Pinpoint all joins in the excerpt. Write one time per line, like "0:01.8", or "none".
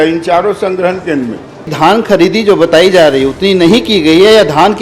0:01.6